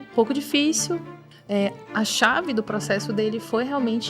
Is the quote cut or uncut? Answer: cut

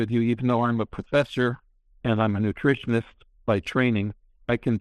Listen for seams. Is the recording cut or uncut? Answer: uncut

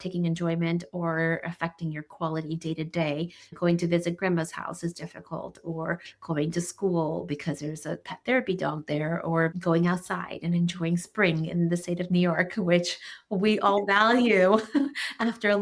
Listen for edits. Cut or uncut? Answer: uncut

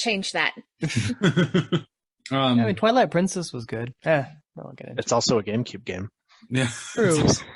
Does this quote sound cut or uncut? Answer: uncut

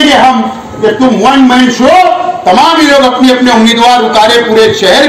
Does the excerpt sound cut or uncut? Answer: uncut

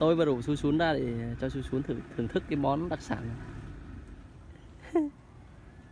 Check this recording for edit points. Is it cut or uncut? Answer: uncut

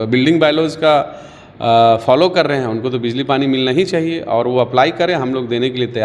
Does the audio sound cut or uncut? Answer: uncut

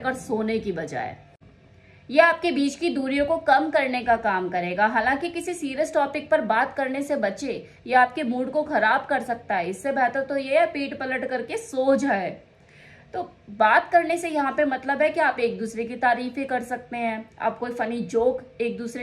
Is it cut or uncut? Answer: cut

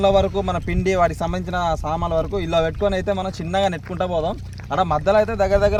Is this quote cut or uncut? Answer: uncut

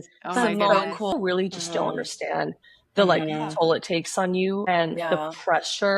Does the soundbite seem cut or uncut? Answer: cut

